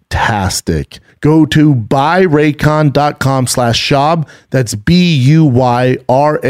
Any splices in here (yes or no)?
yes